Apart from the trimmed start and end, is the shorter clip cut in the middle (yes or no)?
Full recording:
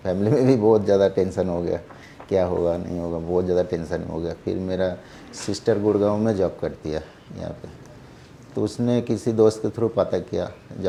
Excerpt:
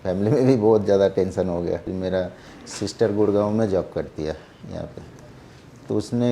yes